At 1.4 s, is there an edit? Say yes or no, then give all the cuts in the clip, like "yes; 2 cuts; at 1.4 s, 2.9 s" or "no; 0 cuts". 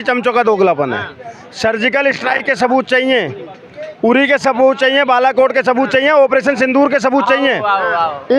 no; 0 cuts